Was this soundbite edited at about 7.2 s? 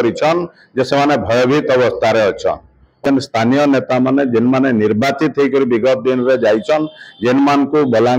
no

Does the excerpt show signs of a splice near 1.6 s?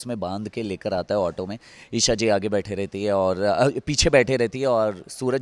no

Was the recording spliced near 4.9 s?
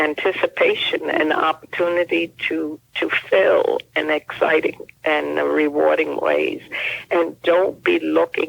yes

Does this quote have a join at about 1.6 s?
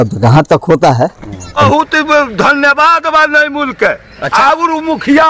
yes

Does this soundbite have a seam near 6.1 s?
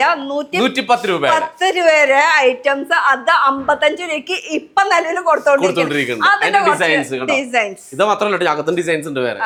no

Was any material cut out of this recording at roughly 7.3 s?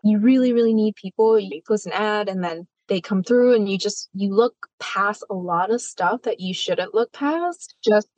no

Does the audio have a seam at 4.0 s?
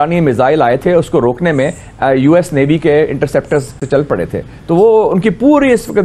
yes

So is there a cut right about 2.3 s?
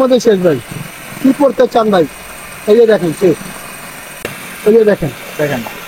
no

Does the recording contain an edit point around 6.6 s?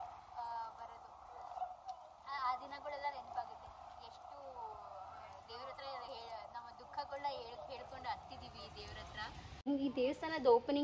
no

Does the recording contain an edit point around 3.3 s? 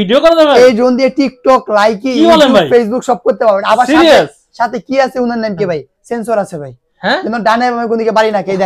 no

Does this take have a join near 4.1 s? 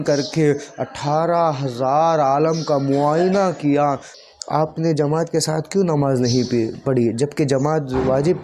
yes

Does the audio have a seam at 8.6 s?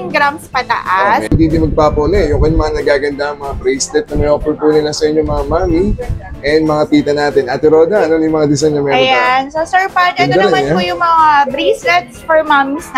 no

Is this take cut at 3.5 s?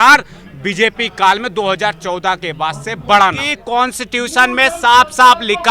yes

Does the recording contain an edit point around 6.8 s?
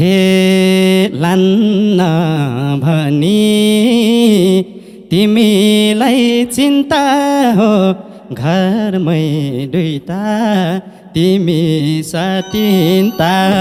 no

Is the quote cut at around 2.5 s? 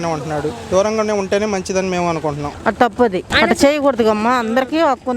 yes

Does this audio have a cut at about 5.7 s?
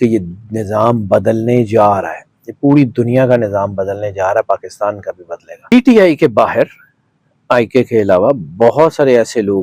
yes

